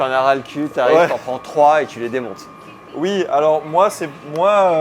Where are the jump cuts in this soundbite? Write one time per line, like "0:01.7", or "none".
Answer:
none